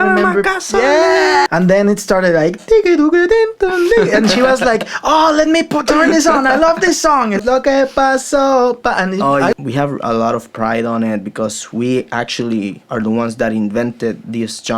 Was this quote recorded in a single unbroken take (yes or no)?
no